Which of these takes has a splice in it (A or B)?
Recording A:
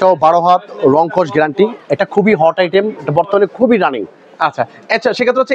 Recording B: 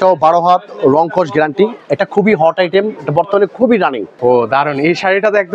B